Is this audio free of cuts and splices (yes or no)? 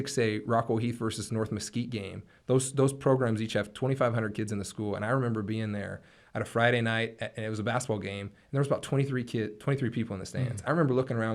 yes